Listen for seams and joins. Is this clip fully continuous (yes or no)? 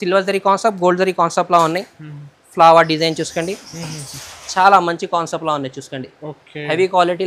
yes